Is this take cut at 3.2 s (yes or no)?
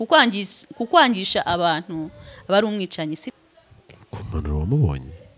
yes